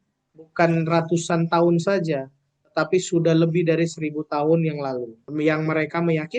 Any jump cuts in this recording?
yes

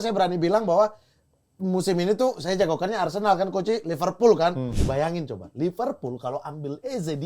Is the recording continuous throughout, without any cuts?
no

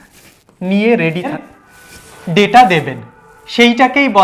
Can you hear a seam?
yes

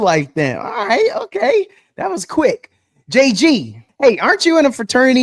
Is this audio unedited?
no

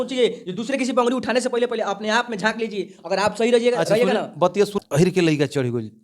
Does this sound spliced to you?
yes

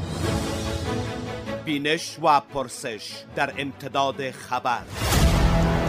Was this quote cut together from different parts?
yes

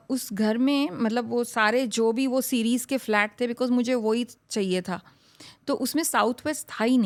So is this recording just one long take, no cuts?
yes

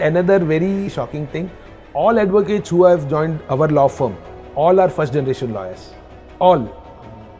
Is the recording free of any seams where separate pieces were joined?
no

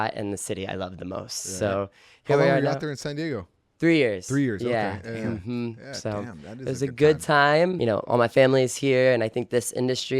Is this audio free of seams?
no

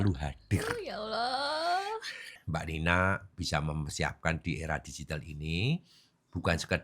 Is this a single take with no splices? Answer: no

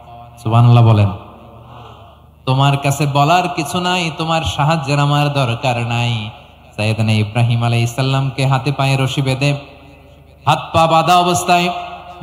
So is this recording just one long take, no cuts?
yes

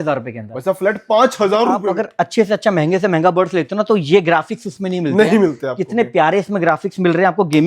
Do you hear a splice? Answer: yes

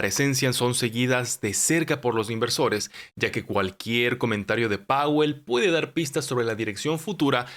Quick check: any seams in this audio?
no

